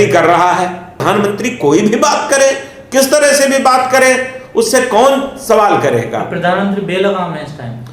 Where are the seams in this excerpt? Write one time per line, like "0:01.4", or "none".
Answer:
0:01.0